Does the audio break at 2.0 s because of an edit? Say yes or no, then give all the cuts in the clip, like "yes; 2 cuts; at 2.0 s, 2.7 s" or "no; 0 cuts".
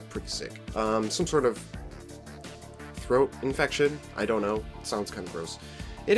yes; 1 cut; at 2.0 s